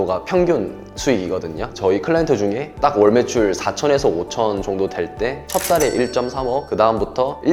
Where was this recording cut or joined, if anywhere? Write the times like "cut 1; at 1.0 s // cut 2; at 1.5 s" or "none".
none